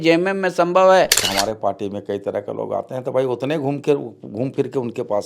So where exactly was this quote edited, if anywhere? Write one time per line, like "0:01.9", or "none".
0:01.2